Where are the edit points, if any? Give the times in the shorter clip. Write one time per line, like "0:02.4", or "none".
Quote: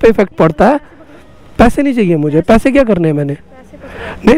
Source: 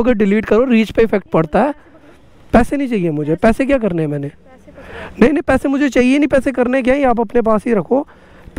none